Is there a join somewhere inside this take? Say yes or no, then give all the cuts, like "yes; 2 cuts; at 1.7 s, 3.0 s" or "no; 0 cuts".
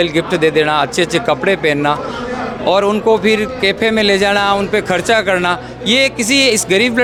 no; 0 cuts